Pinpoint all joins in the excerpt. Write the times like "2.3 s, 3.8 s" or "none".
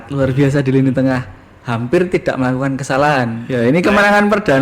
3.4 s